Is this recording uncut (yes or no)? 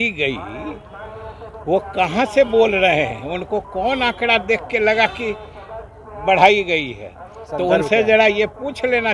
yes